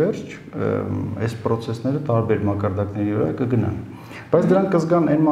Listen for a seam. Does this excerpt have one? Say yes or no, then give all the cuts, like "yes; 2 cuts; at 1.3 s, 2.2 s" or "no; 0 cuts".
no; 0 cuts